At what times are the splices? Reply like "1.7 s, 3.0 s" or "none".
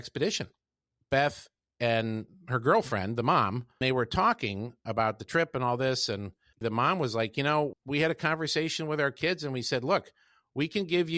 3.8 s, 6.6 s, 7.7 s